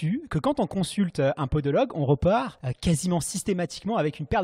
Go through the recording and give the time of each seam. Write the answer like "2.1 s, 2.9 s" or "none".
2.6 s

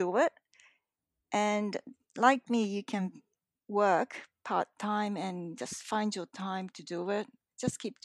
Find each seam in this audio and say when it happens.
none

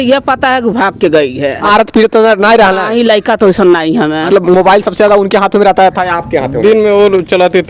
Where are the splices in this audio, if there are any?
1.6 s, 4.3 s

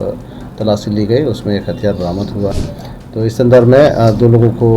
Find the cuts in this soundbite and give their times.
2.5 s

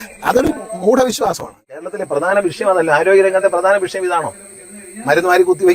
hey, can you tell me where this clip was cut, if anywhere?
1.8 s

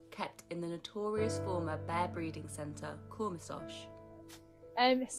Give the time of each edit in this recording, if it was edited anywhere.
none

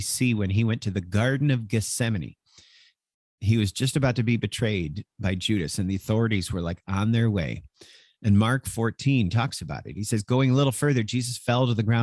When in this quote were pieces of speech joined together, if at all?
none

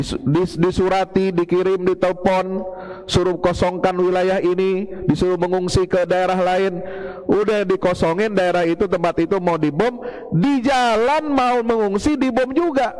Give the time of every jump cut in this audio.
none

